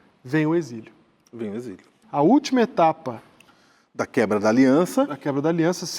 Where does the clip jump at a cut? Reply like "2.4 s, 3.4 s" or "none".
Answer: 1.9 s

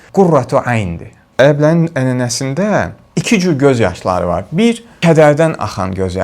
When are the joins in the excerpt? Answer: 1.2 s

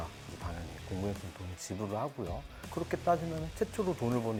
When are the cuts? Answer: none

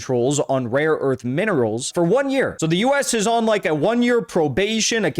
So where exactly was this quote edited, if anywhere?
1.9 s, 2.5 s

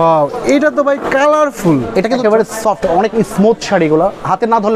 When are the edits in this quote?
2.2 s

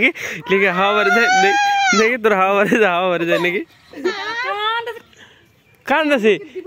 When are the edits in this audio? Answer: none

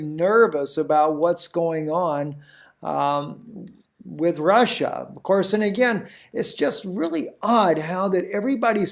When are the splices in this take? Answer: 5.1 s

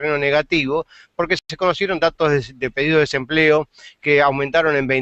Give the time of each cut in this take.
none

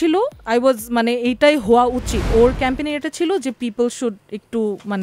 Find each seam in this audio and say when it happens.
2.3 s

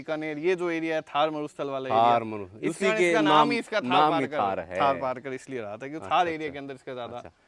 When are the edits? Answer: none

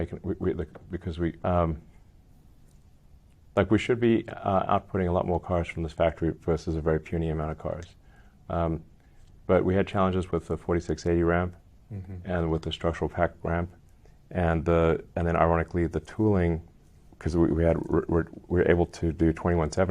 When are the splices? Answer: 1.4 s

